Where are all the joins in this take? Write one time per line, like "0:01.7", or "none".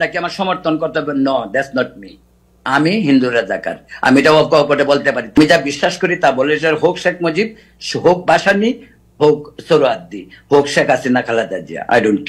0:05.4